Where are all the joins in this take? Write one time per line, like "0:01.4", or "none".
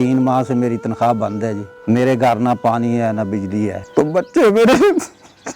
0:01.7
0:03.8